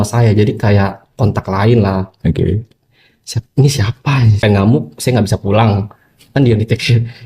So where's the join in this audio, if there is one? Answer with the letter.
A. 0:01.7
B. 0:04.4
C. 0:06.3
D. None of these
B